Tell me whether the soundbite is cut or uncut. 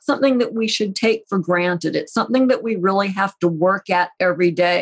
uncut